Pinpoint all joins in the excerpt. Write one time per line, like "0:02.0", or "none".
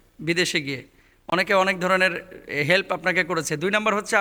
none